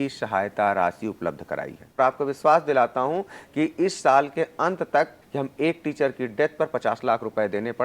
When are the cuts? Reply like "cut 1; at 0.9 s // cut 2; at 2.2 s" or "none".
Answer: cut 1; at 2.0 s // cut 2; at 5.2 s

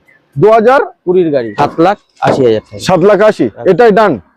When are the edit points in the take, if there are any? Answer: cut 1; at 1.5 s

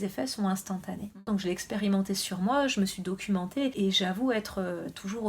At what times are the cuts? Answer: cut 1; at 1.2 s // cut 2; at 3.7 s

